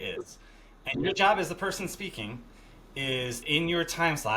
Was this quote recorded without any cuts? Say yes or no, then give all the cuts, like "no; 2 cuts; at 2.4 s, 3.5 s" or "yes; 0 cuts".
no; 1 cut; at 3.4 s